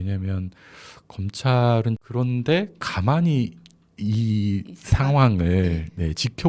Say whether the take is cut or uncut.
cut